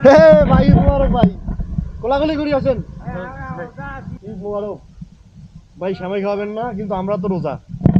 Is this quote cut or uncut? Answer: cut